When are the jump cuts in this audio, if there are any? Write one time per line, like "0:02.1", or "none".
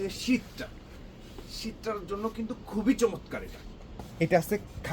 0:04.0